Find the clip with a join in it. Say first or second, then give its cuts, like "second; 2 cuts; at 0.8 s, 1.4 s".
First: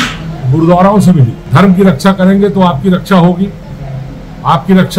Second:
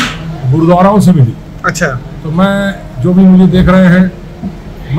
first; 1 cut; at 1.4 s